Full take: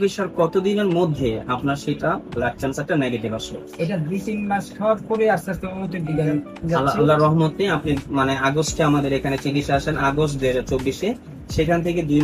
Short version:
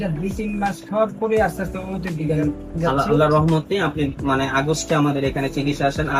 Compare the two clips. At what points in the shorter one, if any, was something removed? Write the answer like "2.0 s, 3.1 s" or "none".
none